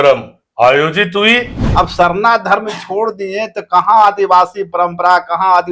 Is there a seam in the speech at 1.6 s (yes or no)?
yes